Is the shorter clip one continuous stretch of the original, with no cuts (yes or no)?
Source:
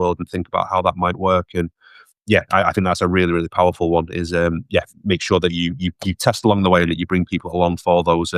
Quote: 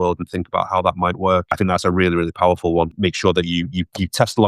no